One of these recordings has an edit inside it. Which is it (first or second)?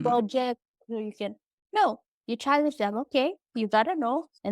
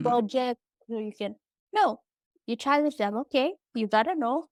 first